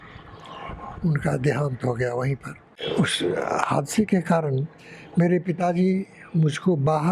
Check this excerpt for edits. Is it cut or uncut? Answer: cut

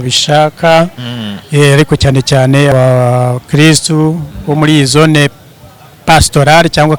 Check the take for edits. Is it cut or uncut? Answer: cut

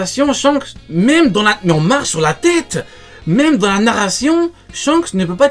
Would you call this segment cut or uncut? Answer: uncut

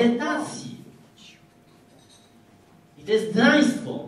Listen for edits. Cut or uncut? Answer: uncut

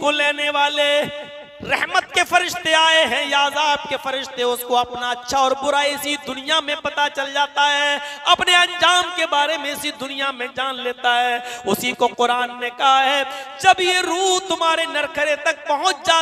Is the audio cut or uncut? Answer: uncut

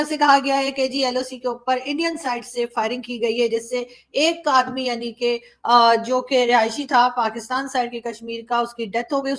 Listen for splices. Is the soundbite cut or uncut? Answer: uncut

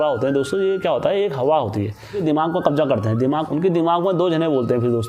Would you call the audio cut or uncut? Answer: cut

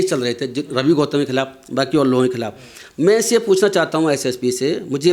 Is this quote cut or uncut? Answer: uncut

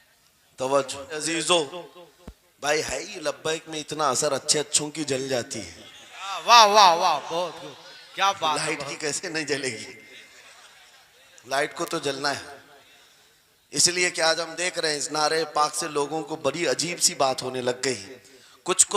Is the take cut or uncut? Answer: cut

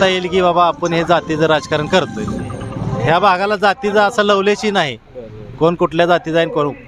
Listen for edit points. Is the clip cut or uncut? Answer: uncut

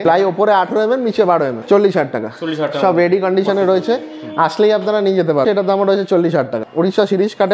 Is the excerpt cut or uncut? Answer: cut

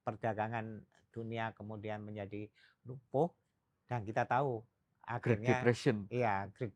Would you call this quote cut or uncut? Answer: uncut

